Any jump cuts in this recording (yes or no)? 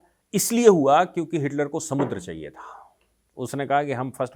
no